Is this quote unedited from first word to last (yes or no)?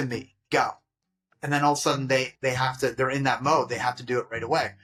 yes